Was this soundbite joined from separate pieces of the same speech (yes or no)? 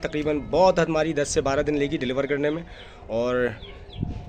no